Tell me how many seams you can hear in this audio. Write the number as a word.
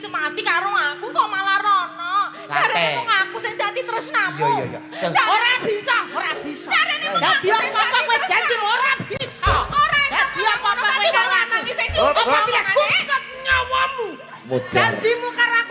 zero